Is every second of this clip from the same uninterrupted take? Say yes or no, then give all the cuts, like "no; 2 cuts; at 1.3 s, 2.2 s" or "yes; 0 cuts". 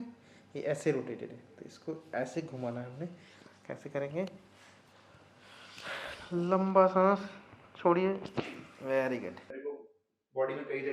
no; 1 cut; at 9.5 s